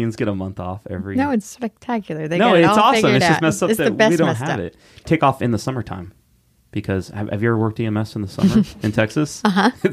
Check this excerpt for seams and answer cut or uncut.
cut